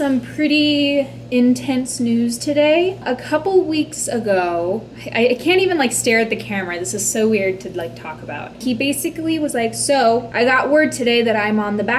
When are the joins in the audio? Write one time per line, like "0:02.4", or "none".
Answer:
0:08.6